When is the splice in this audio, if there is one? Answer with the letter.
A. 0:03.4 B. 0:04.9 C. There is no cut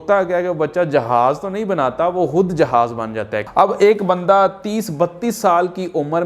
A